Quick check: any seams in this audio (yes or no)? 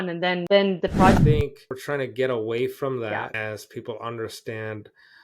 yes